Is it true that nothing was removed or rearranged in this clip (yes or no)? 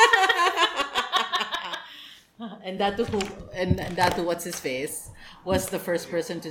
yes